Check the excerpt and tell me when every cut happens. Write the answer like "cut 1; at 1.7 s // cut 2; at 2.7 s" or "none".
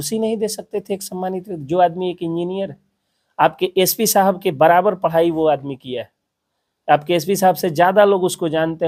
none